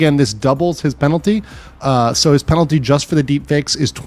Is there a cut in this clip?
no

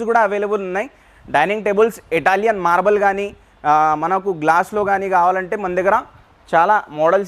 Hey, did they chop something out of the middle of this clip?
no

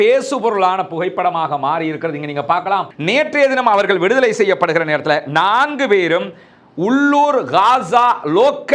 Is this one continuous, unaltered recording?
no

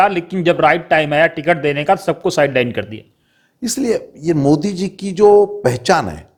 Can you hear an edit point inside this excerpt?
no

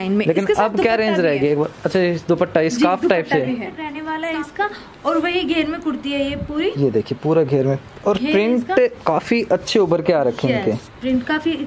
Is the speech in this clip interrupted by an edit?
yes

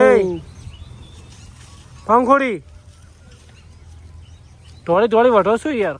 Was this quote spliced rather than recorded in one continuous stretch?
no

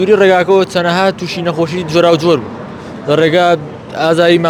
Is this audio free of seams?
yes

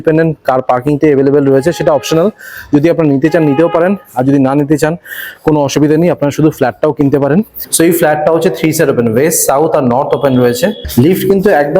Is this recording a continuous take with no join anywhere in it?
no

